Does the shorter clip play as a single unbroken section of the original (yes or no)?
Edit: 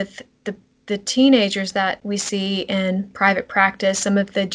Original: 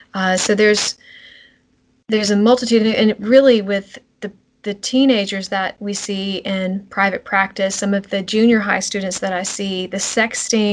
yes